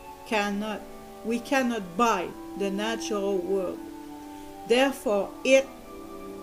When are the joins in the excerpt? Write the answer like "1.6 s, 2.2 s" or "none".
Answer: none